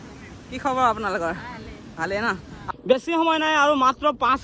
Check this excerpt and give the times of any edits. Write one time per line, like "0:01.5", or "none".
0:02.7